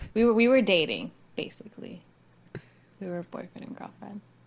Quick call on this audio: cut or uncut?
uncut